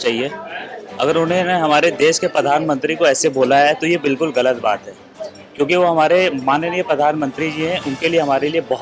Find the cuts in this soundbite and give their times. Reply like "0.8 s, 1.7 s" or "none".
none